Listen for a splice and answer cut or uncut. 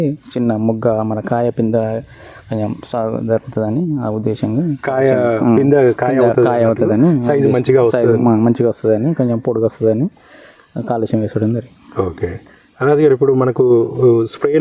uncut